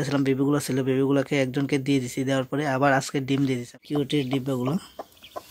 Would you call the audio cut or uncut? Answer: cut